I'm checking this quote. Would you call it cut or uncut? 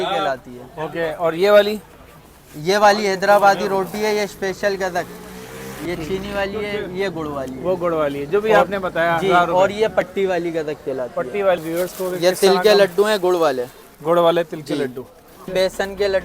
cut